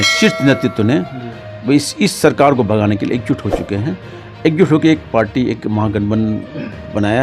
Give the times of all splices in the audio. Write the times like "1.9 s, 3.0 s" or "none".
none